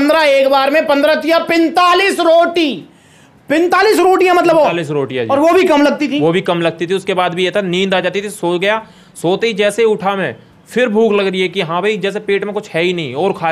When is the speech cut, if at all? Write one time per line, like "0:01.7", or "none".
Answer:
none

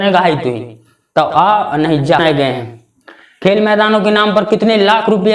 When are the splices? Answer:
0:02.2

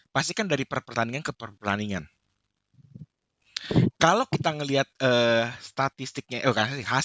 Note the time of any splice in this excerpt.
none

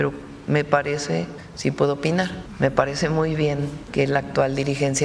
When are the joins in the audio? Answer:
0:01.4
0:02.4
0:03.8

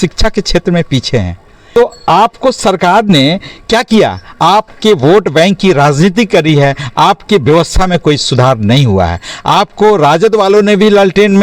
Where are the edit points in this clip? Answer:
0:01.6

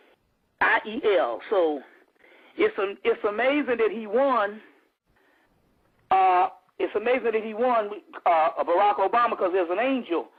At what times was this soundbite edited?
none

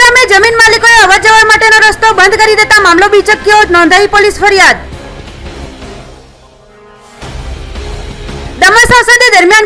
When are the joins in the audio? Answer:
none

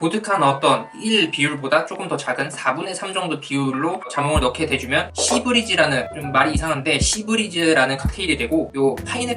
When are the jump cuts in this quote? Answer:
none

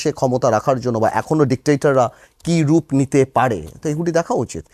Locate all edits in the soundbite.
none

